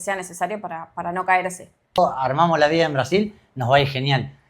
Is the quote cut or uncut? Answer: cut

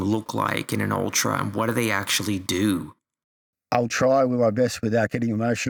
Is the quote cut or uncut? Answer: uncut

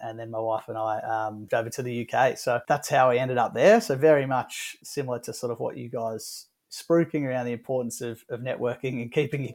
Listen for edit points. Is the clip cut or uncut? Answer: cut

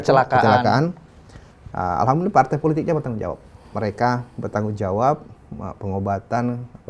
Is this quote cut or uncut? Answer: uncut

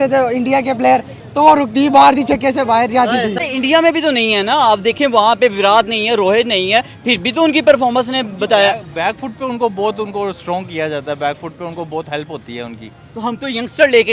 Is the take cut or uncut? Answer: cut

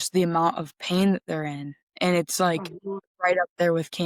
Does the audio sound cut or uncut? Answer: uncut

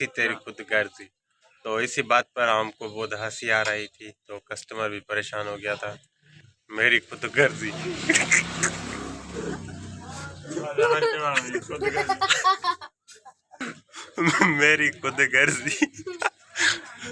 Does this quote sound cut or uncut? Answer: uncut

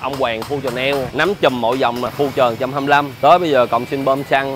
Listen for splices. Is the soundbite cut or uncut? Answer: cut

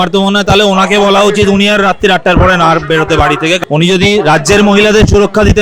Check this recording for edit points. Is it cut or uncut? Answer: cut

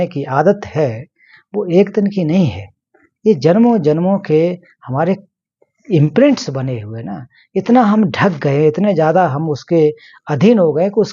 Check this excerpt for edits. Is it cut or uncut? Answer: uncut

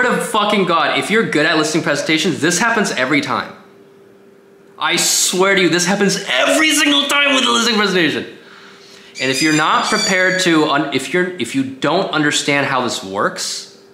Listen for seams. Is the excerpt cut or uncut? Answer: uncut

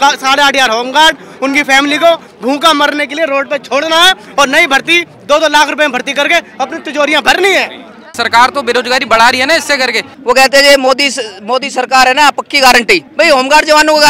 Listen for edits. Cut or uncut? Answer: cut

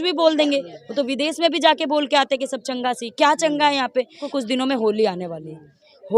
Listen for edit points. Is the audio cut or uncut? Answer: cut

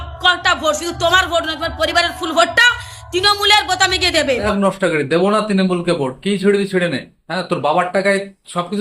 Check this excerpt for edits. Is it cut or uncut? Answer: cut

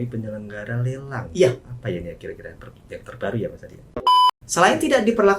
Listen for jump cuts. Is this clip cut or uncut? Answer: cut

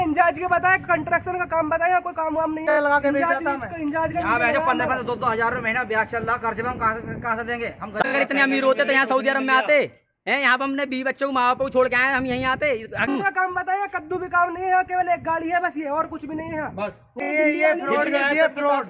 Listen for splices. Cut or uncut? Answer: cut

